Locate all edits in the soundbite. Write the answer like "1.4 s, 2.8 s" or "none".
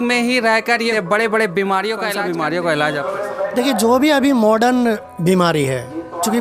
0.9 s, 2.1 s